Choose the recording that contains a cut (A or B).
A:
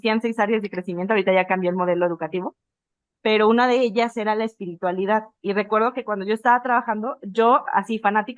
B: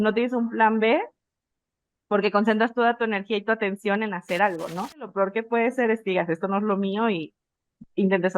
B